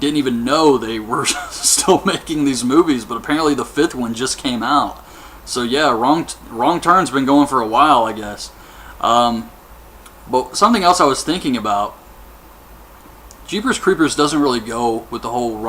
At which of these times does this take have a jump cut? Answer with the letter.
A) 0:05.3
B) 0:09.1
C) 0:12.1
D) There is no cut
B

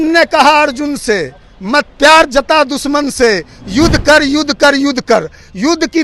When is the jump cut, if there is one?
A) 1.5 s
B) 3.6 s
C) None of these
C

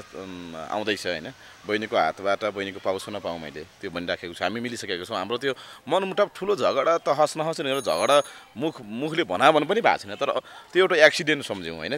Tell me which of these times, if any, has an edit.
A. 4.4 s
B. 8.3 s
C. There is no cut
C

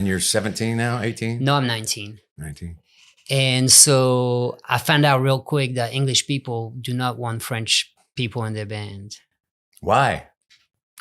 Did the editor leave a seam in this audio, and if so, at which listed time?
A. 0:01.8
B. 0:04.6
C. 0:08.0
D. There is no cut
C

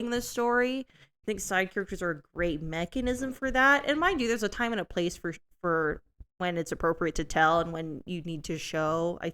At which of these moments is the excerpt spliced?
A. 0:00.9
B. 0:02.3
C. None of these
C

